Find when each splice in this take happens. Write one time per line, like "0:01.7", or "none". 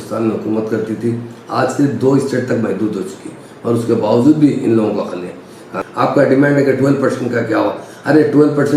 0:05.7